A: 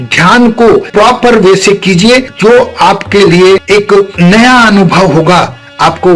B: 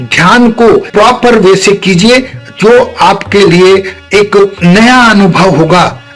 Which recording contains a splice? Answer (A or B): A